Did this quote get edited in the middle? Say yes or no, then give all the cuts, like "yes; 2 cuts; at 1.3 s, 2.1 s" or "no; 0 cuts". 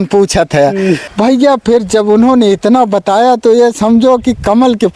yes; 1 cut; at 1.1 s